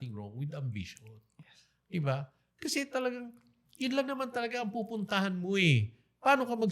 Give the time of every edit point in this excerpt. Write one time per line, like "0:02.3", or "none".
none